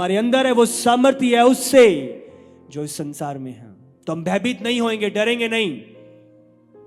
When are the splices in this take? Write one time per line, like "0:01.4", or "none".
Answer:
none